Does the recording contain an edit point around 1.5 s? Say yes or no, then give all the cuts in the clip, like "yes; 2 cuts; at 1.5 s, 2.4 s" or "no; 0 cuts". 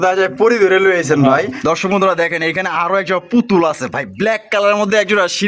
yes; 1 cut; at 1.5 s